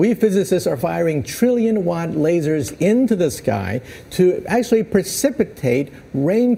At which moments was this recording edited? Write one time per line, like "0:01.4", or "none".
none